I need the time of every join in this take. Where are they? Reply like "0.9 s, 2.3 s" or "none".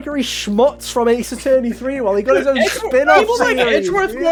none